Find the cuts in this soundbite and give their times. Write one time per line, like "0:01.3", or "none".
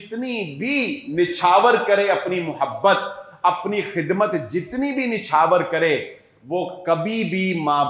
none